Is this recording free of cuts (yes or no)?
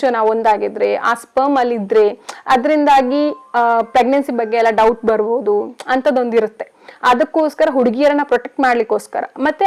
yes